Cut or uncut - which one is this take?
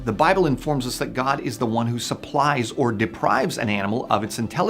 uncut